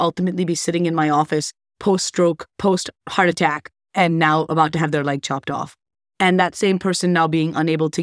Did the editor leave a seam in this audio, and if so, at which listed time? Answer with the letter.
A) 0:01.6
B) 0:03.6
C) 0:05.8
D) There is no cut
D